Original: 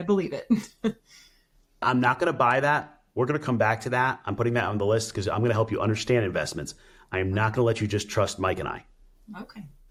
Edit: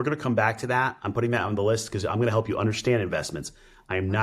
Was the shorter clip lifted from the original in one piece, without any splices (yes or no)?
yes